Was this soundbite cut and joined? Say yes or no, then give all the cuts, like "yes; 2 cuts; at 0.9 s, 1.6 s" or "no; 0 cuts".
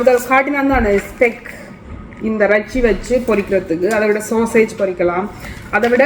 no; 0 cuts